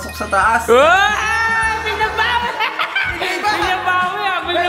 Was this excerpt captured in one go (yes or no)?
yes